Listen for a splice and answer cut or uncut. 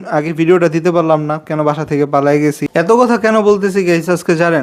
cut